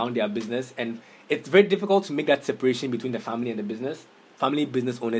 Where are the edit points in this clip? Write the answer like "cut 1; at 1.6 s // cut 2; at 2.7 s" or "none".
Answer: cut 1; at 4.1 s